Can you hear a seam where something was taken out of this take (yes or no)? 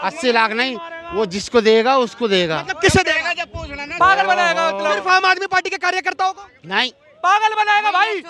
no